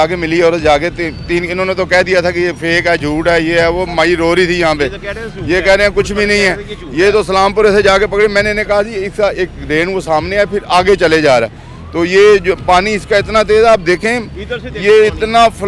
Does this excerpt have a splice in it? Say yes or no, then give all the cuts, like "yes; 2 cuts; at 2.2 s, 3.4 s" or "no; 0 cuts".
no; 0 cuts